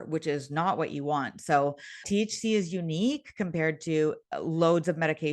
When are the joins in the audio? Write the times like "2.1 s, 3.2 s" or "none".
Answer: 2.0 s